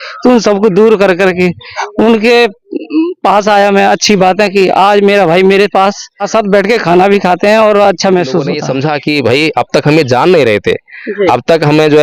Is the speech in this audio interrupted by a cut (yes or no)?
yes